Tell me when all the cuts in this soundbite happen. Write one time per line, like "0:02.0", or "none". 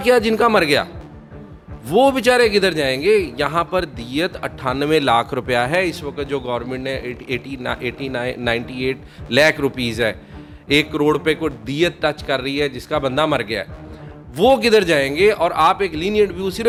none